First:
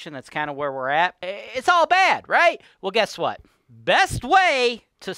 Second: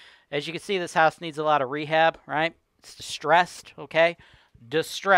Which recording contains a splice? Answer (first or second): first